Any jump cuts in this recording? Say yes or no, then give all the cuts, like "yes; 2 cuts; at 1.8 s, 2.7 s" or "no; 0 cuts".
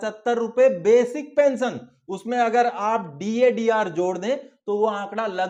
no; 0 cuts